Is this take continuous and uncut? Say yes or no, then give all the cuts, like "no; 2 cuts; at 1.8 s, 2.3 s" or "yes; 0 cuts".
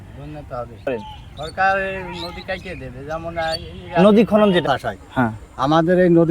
no; 2 cuts; at 1.0 s, 4.6 s